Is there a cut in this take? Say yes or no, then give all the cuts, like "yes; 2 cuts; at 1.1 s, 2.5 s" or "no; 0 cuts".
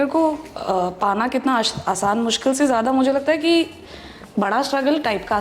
no; 0 cuts